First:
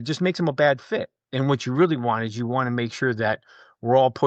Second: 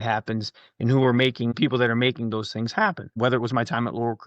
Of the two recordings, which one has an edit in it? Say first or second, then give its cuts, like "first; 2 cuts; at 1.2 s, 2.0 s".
second; 2 cuts; at 1.5 s, 3.2 s